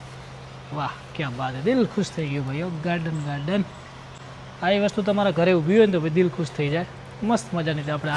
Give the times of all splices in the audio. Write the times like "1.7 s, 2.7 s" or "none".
none